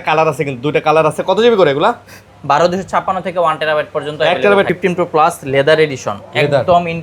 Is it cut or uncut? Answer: cut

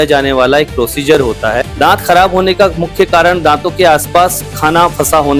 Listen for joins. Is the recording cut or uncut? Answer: cut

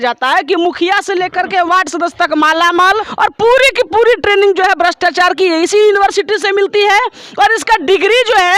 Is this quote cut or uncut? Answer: cut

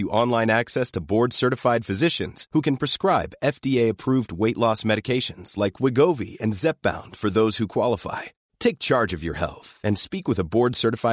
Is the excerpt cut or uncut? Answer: uncut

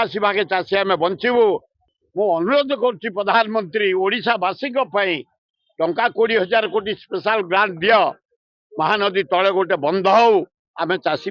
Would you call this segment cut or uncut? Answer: cut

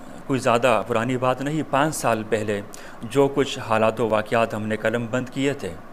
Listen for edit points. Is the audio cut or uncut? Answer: uncut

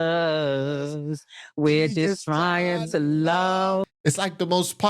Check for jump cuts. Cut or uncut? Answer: cut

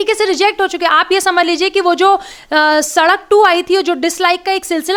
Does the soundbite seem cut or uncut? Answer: uncut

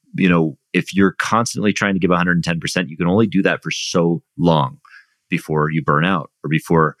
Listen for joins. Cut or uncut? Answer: uncut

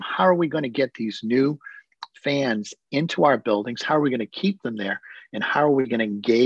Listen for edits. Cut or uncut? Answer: uncut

